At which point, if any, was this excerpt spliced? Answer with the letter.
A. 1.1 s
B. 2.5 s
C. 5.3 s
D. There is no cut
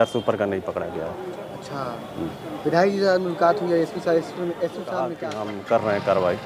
C